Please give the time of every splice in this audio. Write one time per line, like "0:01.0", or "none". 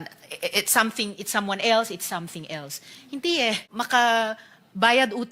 0:03.6